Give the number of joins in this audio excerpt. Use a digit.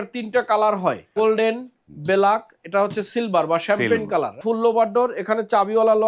2